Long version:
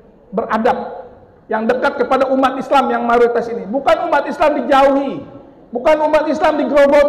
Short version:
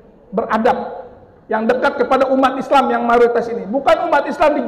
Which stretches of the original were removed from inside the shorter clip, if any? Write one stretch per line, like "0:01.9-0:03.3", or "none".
none